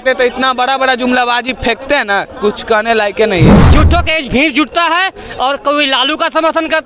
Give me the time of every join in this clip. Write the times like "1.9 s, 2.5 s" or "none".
3.6 s